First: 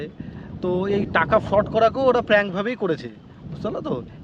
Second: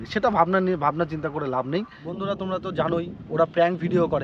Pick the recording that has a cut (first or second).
second